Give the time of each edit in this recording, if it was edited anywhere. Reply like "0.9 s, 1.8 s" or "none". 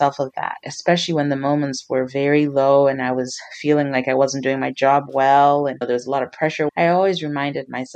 6.7 s